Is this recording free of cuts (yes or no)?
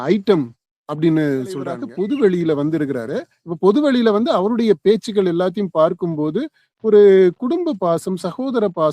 no